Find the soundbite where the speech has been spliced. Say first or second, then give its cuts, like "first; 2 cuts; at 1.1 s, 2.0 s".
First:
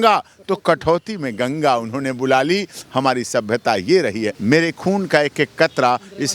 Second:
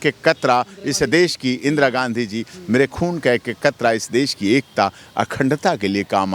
first; 1 cut; at 4.3 s